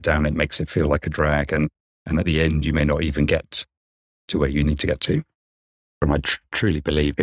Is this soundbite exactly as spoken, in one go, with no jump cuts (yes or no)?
no